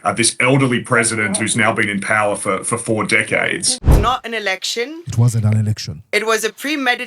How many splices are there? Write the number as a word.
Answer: one